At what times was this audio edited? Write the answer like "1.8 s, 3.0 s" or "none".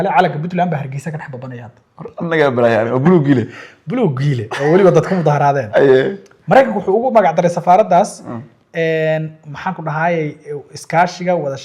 none